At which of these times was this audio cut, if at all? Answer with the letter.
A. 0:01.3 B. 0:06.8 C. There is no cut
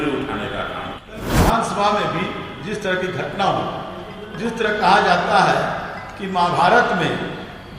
A